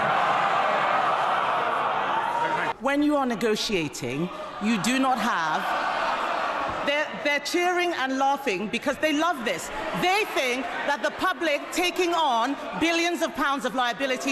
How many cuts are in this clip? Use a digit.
1